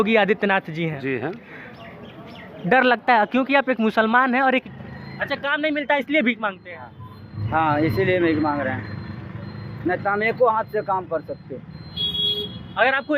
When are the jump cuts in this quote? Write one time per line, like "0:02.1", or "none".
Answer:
0:04.7